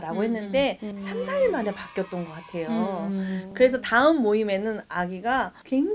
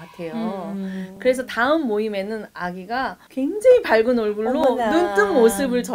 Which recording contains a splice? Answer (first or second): first